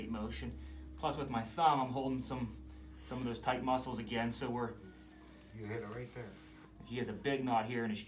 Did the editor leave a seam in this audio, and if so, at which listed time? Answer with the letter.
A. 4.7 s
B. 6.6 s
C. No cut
B